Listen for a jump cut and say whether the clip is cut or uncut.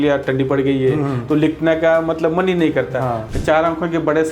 cut